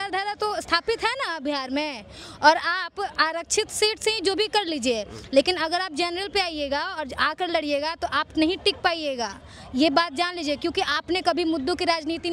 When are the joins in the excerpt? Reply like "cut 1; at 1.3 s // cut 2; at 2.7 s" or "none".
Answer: none